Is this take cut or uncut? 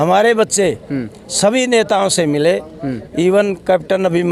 uncut